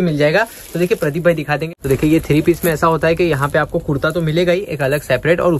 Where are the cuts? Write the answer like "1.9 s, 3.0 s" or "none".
1.7 s